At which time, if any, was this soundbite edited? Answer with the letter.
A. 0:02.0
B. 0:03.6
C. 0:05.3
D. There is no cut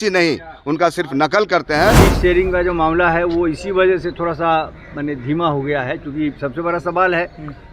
A